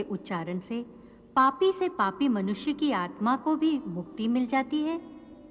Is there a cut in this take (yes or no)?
no